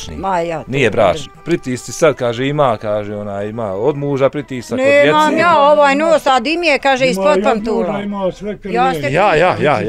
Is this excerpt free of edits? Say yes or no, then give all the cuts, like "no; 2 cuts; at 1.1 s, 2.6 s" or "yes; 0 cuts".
no; 1 cut; at 1.3 s